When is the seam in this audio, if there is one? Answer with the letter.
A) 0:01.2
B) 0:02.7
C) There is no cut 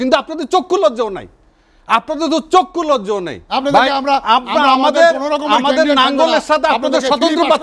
C